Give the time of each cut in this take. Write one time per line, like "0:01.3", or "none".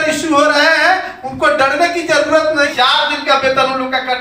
0:02.7